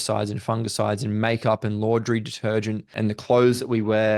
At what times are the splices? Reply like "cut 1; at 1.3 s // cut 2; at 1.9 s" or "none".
cut 1; at 2.9 s